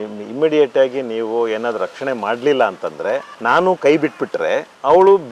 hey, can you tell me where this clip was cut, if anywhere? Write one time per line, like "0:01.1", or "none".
0:03.3